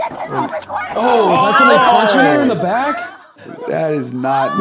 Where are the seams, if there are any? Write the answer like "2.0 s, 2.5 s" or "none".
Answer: 3.1 s